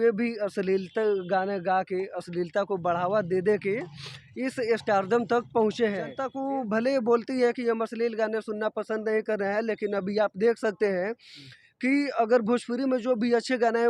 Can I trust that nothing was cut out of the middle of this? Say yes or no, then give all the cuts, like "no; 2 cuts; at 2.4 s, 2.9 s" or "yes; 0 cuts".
no; 1 cut; at 6.3 s